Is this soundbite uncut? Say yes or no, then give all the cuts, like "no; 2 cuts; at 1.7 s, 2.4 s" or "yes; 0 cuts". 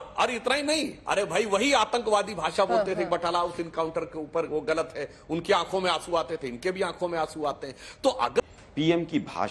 no; 1 cut; at 8.4 s